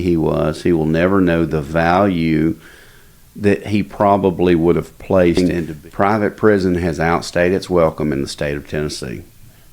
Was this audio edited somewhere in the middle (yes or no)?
yes